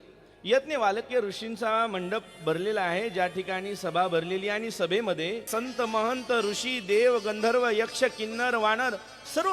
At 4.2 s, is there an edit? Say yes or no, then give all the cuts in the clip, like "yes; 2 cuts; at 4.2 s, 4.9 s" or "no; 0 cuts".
no; 1 cut; at 5.5 s